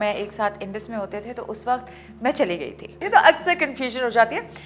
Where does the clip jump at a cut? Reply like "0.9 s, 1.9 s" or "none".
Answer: 3.0 s